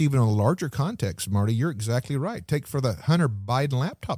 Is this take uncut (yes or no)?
yes